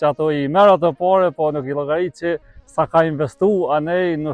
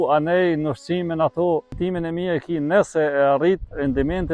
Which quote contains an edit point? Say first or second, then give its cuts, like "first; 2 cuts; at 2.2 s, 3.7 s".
second; 1 cut; at 1.7 s